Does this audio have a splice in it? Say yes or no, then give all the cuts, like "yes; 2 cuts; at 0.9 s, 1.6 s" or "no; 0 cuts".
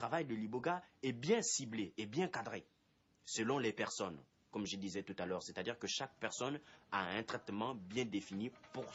no; 0 cuts